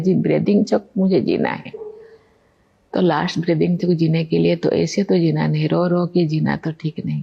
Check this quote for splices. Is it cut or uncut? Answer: uncut